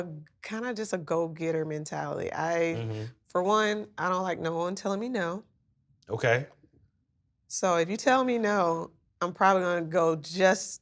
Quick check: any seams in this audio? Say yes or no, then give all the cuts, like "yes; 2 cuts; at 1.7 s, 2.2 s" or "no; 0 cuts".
no; 0 cuts